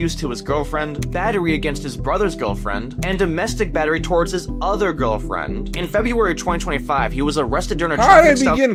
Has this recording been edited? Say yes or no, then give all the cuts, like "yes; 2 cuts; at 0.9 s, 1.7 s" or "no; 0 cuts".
no; 0 cuts